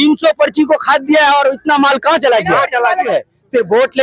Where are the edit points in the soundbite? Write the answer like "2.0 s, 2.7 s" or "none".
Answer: 3.1 s